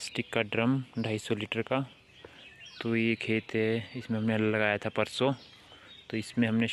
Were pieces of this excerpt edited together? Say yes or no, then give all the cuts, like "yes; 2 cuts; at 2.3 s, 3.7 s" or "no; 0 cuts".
no; 0 cuts